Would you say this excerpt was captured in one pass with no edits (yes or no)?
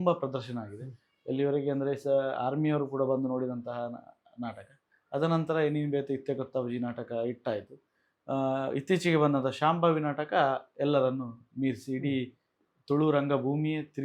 yes